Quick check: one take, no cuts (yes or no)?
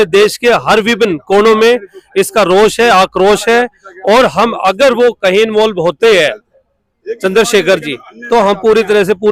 yes